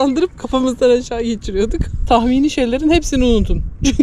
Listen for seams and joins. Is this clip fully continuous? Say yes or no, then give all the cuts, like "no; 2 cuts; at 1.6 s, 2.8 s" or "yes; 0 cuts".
no; 1 cut; at 2.0 s